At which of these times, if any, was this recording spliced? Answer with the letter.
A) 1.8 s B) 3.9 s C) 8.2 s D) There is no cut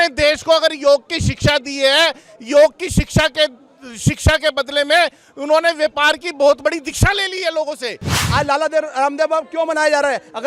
C